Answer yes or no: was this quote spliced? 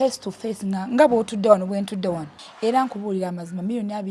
yes